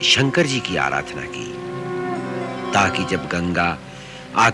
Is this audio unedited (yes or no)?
yes